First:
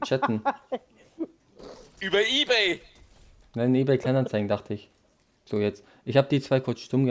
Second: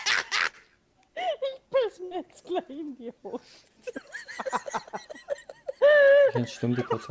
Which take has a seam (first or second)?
first